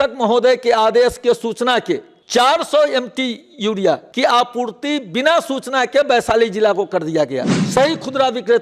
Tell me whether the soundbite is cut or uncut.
cut